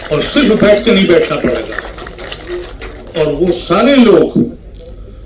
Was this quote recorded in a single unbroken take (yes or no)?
yes